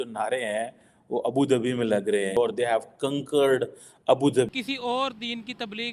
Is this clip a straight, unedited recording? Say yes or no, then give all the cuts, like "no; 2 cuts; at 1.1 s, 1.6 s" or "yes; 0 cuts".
no; 2 cuts; at 2.3 s, 4.5 s